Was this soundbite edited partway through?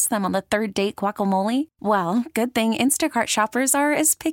no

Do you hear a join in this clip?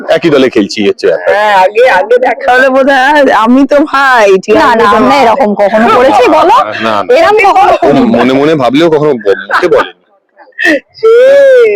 no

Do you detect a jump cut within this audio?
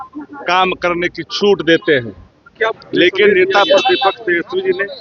yes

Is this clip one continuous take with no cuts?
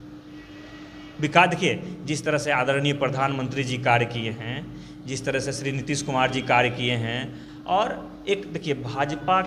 yes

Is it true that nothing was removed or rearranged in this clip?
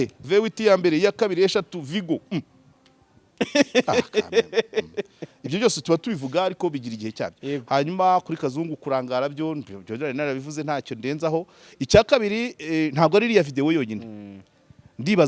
yes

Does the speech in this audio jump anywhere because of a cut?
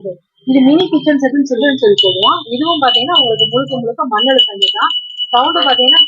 yes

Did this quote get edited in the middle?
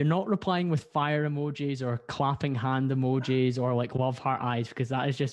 no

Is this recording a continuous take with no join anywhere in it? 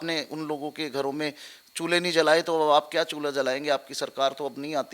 yes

